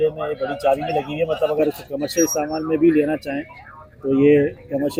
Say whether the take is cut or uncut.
uncut